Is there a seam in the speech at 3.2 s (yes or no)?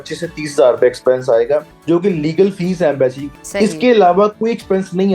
yes